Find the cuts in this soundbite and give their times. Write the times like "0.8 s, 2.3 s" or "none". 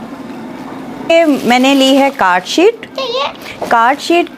1.1 s